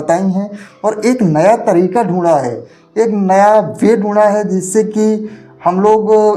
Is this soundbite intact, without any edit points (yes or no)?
yes